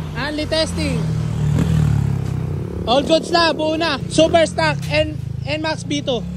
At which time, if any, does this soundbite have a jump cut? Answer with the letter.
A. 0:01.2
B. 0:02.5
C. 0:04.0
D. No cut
C